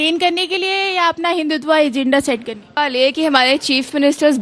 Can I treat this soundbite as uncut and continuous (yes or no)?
no